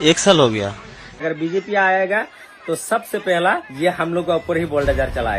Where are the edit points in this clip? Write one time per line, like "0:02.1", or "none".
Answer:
0:01.2